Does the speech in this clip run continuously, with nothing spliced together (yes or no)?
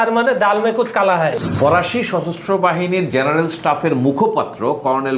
no